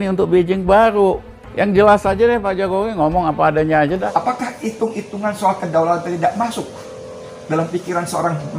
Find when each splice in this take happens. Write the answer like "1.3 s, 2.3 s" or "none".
4.0 s

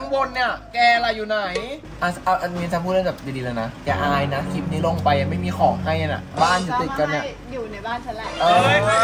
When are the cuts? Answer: 1.8 s

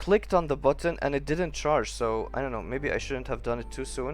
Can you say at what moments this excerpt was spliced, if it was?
none

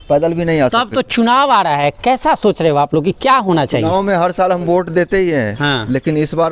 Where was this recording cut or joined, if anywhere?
none

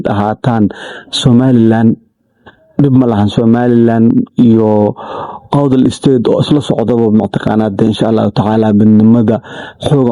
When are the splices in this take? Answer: none

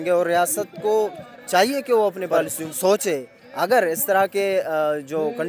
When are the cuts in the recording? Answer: 2.6 s

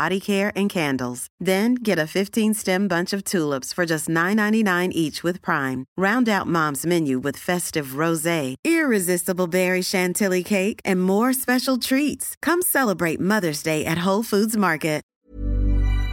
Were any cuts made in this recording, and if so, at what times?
15.1 s

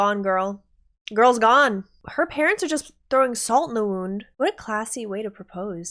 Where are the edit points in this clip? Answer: 2.0 s, 4.3 s

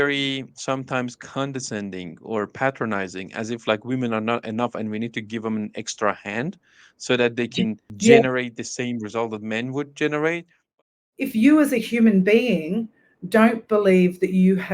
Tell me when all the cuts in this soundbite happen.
7.9 s, 10.8 s

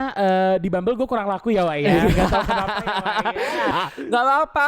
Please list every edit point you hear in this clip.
3.7 s

